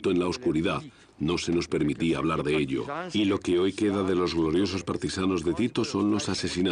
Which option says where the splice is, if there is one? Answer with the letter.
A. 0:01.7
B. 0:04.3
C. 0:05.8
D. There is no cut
B